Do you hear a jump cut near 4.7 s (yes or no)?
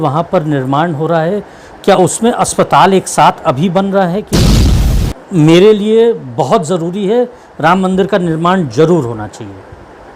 yes